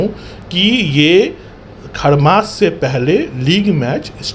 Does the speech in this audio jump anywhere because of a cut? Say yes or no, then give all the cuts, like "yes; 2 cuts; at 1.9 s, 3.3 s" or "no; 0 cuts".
no; 0 cuts